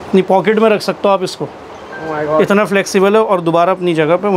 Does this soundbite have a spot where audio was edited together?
no; 0 cuts

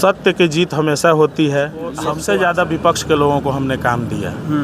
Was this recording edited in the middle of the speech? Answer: yes; 1 cut; at 2.1 s

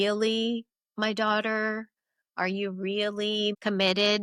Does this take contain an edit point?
no; 0 cuts

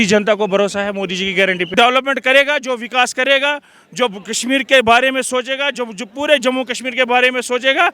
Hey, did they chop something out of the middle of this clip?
yes; 1 cut; at 1.7 s

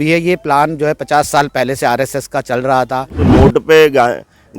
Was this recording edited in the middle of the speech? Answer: yes; 1 cut; at 3.3 s

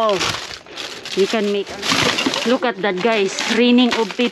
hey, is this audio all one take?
no; 1 cut; at 1.7 s

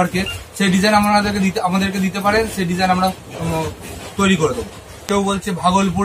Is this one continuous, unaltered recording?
no; 1 cut; at 5.1 s

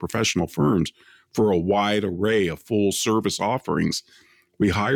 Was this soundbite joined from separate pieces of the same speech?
yes; 1 cut; at 3.0 s

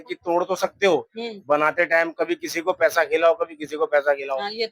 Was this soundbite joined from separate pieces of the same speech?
no; 0 cuts

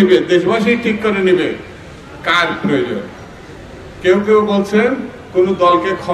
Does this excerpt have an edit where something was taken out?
no; 0 cuts

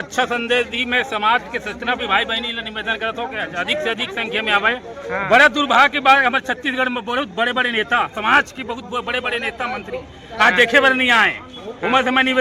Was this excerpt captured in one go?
yes; 0 cuts

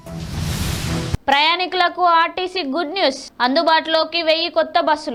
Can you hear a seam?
no; 0 cuts

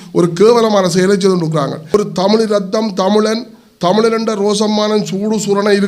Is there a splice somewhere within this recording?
yes; 1 cut; at 1.9 s

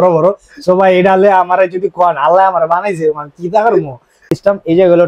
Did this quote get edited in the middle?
yes; 1 cut; at 4.1 s

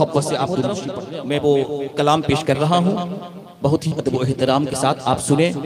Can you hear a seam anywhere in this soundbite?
yes; 1 cut; at 0.9 s

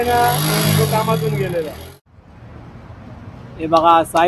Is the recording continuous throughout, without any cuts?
no; 1 cut; at 2.0 s

